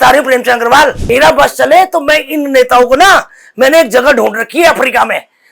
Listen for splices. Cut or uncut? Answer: cut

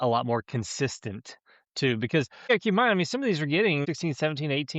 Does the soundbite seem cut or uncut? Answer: cut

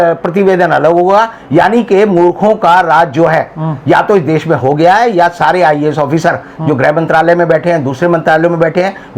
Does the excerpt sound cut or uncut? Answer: uncut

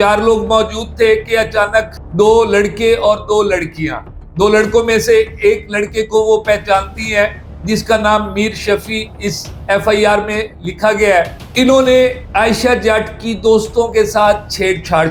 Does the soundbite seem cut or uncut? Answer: uncut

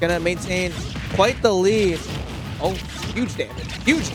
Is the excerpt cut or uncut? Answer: uncut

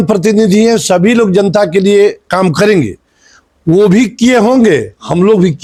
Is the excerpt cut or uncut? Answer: uncut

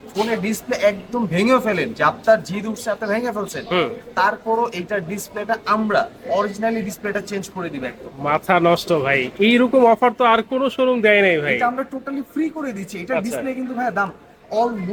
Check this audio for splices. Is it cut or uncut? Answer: uncut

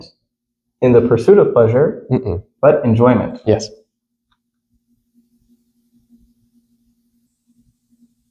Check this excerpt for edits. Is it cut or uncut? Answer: cut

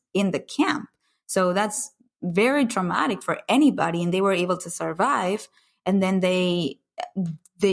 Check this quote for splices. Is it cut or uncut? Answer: uncut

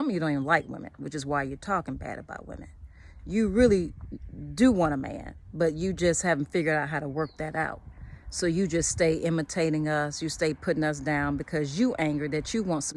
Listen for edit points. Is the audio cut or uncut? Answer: uncut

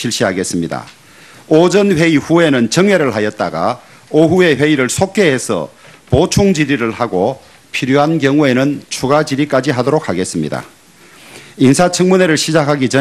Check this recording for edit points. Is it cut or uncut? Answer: uncut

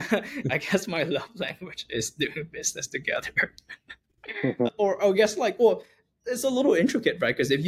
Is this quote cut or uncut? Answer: uncut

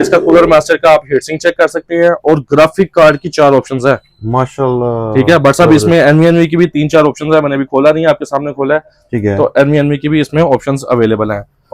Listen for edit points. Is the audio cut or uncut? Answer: uncut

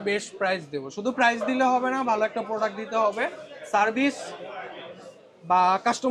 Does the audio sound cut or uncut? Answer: uncut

